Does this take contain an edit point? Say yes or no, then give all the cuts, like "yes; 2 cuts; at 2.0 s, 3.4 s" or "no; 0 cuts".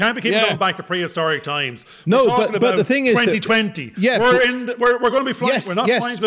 no; 0 cuts